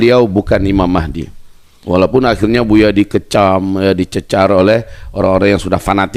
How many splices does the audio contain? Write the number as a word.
zero